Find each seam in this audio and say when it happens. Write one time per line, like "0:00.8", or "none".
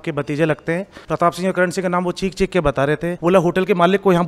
0:01.0
0:03.2